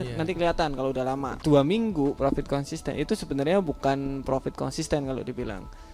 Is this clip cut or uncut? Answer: cut